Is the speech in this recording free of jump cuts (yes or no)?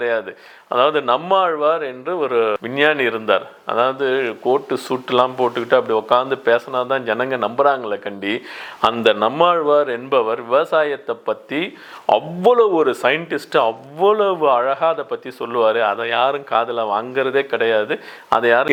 yes